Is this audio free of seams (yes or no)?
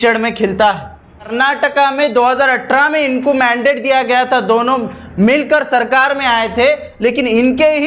no